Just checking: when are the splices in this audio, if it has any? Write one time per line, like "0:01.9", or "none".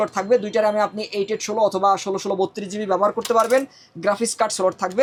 none